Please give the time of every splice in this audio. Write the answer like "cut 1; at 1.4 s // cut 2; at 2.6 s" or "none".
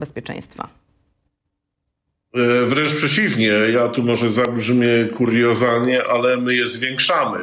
none